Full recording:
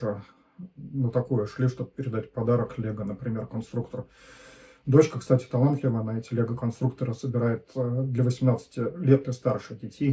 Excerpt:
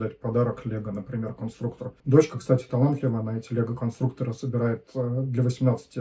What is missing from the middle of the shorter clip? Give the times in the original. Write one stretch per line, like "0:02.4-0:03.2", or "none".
0:04.0-0:04.7